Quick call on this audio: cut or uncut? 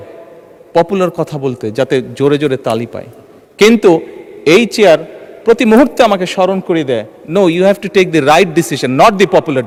uncut